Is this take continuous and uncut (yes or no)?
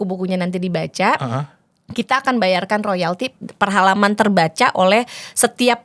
yes